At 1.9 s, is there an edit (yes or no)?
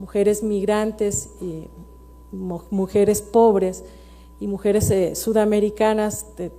no